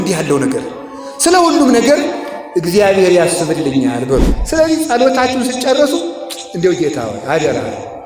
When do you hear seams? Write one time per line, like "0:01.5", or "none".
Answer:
0:04.3